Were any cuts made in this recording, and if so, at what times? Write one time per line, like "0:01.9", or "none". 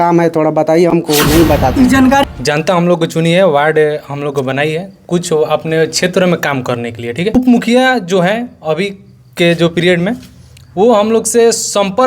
0:02.2
0:07.4